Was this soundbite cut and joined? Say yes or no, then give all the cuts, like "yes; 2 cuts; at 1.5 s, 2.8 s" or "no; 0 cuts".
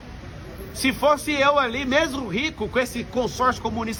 no; 0 cuts